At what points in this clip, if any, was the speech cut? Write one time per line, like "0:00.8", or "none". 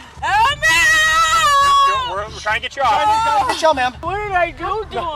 0:04.1